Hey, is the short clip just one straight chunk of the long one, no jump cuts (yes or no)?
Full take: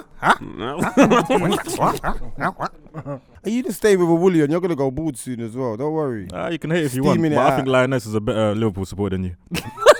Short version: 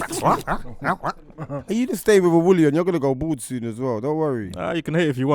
no